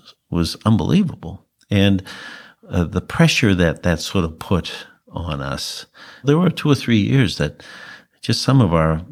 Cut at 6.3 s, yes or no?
yes